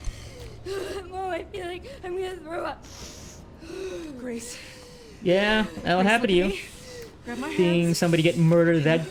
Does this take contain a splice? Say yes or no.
no